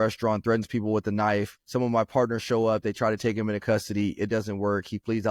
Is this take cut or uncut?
uncut